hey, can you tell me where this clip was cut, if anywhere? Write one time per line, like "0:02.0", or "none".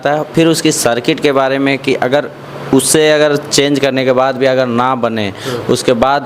none